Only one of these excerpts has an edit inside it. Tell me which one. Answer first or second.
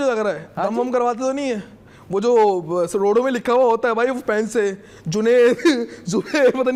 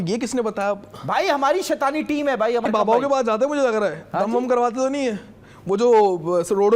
second